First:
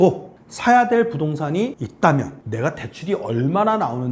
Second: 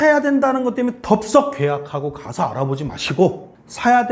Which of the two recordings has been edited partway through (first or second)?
first